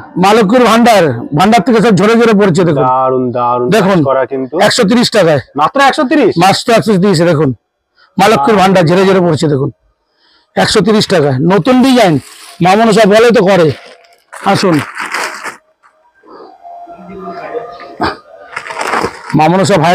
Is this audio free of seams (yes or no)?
yes